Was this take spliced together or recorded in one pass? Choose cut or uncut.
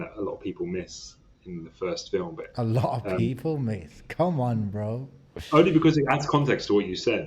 uncut